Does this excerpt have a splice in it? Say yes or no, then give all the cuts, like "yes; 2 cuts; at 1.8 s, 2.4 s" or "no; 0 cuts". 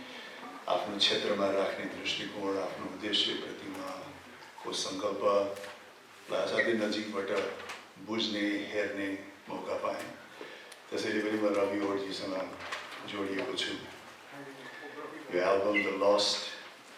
no; 0 cuts